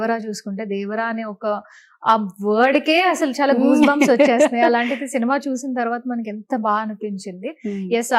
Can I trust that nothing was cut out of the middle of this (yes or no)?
yes